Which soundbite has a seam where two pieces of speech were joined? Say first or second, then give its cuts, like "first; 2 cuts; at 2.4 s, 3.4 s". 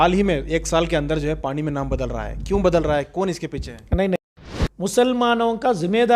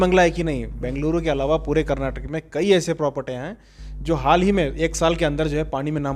first; 1 cut; at 4.2 s